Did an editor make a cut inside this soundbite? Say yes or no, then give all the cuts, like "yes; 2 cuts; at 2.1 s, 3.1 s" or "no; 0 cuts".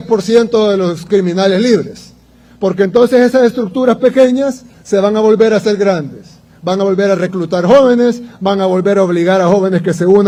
no; 0 cuts